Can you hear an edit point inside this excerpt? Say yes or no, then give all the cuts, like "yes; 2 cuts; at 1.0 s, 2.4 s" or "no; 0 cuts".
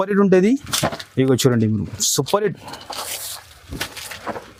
no; 0 cuts